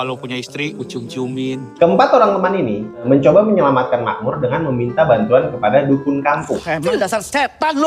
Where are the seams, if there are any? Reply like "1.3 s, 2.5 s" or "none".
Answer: 1.7 s, 3.1 s, 6.6 s